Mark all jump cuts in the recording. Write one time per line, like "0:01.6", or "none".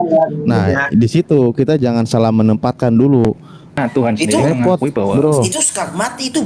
0:03.8